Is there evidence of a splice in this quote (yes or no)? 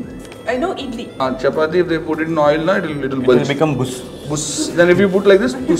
yes